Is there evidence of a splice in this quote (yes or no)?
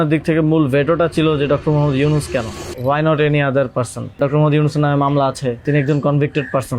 yes